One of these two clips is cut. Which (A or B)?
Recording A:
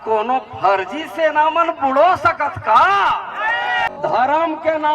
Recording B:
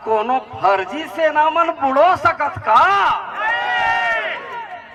A